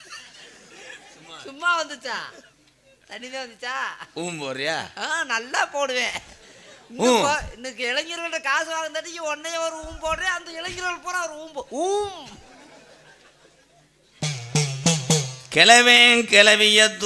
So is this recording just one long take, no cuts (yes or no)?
yes